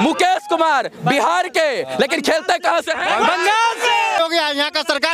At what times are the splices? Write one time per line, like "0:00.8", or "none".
0:04.2